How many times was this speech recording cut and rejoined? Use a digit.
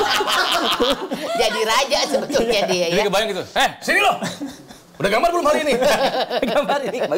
0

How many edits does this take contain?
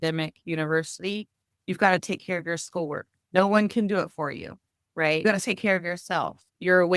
2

